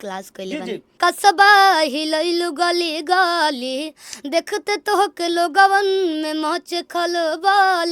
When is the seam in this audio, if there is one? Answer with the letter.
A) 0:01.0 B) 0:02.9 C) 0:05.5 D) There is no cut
A